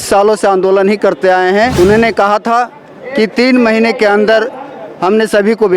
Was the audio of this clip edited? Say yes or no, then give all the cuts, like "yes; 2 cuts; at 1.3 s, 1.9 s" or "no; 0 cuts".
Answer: yes; 1 cut; at 1.7 s